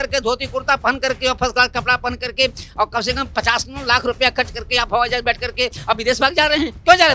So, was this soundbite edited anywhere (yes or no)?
no